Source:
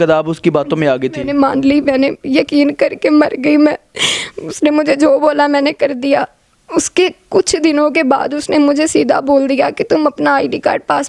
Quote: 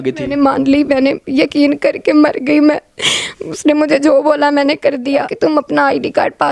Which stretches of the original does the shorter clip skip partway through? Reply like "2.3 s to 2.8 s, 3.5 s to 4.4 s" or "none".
6.3 s to 9.8 s

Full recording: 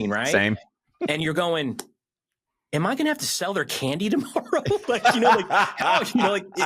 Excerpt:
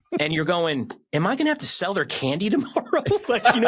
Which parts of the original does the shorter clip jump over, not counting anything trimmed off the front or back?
1.9 s to 2.6 s

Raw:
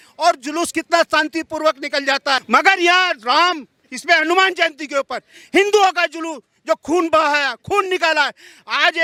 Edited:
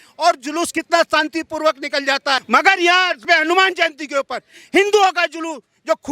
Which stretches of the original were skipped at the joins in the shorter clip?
3.2 s to 4.0 s

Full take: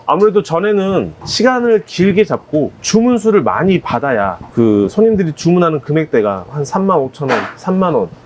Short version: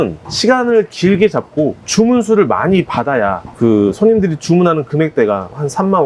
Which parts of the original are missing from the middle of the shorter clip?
none

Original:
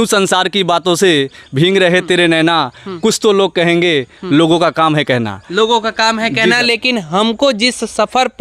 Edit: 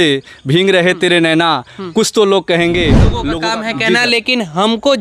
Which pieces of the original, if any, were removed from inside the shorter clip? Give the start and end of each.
4.3 s to 5.8 s

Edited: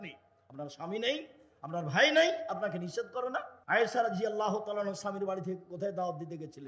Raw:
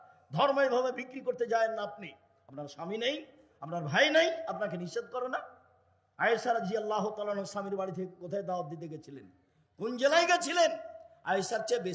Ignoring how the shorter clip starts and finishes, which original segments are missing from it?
5.5 s to 6.1 s

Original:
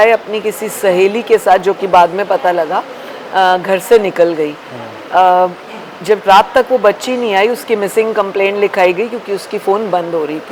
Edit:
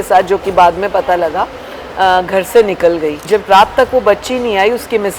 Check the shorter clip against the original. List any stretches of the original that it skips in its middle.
4.5 s to 5.9 s

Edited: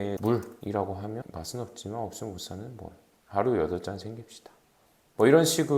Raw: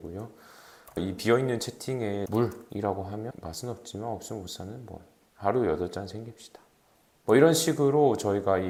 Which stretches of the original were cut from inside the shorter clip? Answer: none

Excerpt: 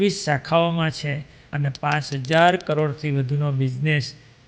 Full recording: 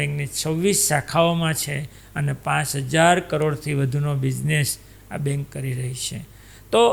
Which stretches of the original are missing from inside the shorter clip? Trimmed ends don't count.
none

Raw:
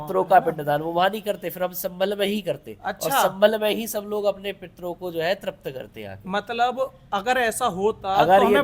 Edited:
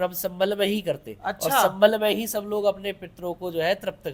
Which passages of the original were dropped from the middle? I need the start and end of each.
none

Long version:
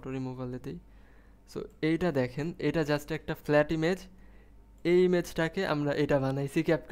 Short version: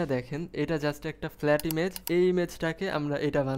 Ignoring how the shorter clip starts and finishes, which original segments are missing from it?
4.0 s to 4.7 s

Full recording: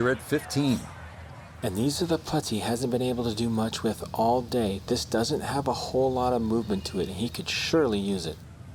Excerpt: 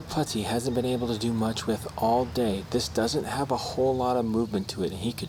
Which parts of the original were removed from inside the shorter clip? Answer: none

